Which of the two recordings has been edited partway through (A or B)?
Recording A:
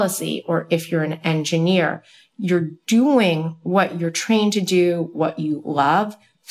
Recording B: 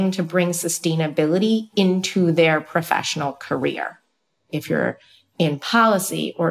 B